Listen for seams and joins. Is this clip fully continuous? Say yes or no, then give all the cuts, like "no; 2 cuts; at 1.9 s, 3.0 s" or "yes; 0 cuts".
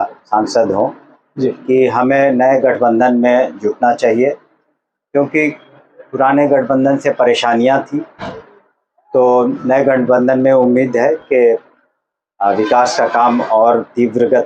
yes; 0 cuts